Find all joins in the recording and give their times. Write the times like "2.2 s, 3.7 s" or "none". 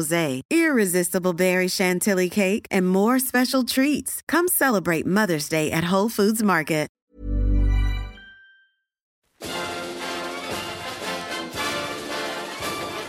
7.0 s, 9.3 s